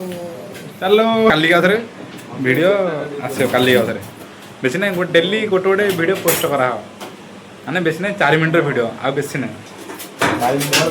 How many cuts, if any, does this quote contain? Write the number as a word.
one